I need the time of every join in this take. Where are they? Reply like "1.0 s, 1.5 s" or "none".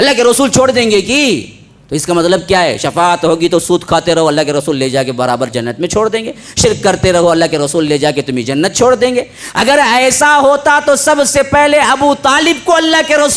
none